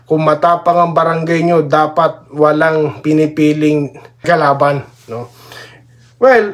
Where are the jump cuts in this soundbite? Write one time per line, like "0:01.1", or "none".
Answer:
0:04.2